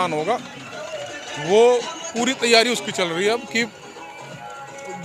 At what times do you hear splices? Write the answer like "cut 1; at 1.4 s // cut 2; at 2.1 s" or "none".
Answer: none